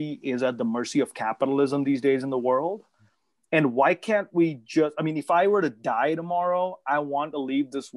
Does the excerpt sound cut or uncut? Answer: uncut